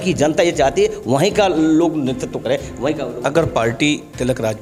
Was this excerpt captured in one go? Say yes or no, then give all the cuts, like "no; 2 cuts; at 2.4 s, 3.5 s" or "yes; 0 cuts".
yes; 0 cuts